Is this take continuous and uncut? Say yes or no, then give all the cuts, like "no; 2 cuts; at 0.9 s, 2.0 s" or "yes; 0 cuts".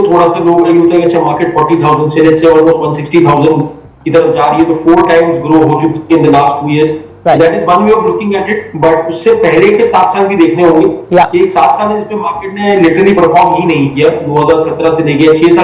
yes; 0 cuts